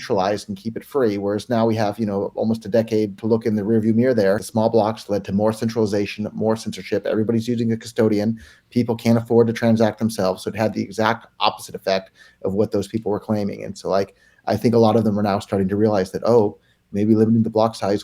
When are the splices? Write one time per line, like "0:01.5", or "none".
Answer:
0:03.2
0:04.5